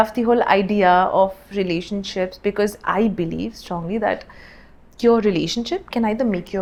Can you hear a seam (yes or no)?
no